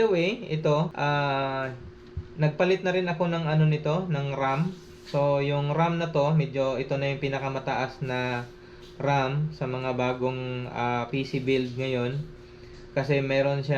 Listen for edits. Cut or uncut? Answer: cut